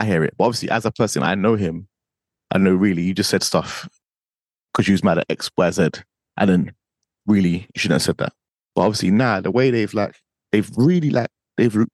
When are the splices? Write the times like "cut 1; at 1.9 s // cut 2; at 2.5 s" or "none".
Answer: cut 1; at 8.4 s